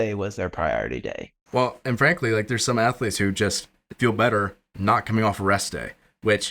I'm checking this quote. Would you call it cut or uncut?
cut